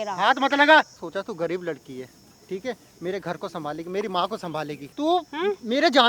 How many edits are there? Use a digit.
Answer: 2